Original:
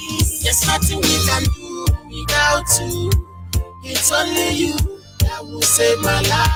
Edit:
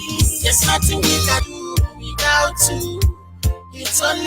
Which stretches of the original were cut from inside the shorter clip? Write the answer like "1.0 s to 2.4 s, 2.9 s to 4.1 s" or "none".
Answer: 1.4 s to 1.5 s